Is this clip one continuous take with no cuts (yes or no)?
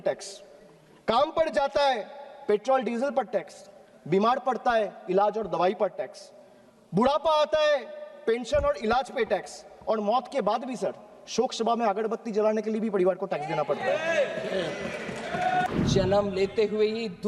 no